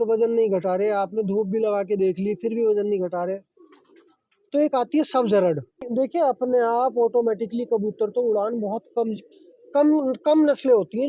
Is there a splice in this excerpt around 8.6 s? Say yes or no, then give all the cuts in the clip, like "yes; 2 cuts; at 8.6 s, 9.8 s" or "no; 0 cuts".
no; 1 cut; at 5.9 s